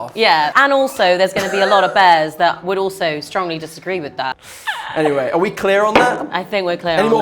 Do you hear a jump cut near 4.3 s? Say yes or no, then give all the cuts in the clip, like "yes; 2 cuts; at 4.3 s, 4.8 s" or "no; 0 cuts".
yes; 1 cut; at 4.3 s